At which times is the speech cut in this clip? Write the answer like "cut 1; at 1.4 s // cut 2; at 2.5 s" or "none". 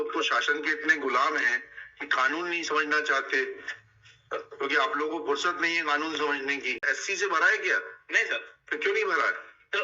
cut 1; at 6.8 s

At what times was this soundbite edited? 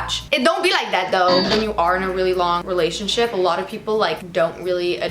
cut 1; at 1.5 s // cut 2; at 2.6 s // cut 3; at 4.2 s

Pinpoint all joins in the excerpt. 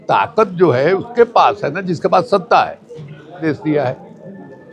cut 1; at 3.4 s

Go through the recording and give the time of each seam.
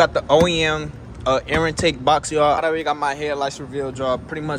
cut 1; at 2.6 s

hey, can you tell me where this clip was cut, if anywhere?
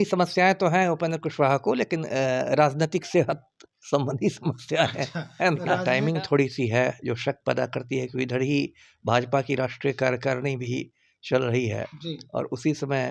cut 1; at 5.8 s

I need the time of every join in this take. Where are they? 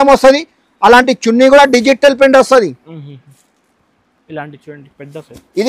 none

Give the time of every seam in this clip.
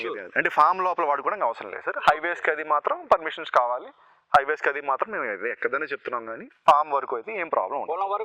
none

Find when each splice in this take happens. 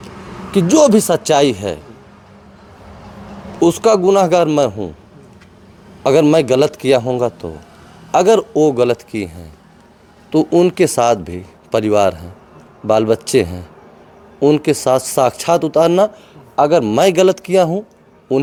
none

